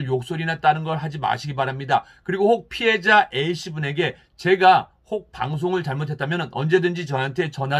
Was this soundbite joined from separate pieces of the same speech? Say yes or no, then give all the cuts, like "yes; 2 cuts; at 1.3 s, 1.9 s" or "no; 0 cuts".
no; 0 cuts